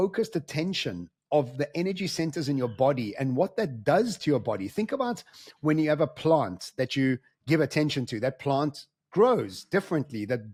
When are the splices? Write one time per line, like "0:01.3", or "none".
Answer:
none

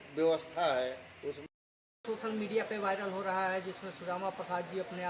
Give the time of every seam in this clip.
0:01.4

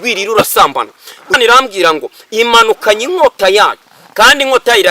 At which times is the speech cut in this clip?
0:01.4

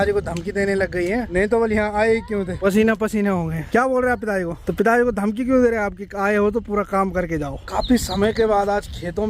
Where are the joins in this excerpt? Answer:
0:01.3
0:02.5
0:03.7
0:04.6
0:07.7

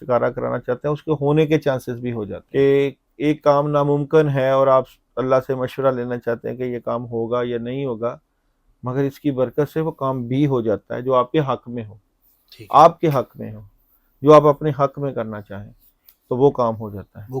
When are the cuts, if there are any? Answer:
0:02.3

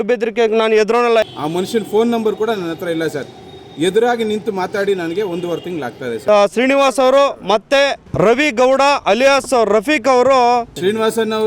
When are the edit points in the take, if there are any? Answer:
0:01.2
0:06.2
0:10.7

